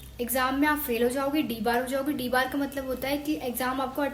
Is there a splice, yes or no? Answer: no